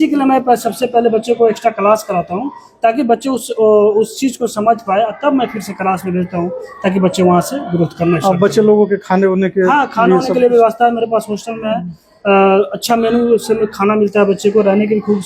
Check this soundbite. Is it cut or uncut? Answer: uncut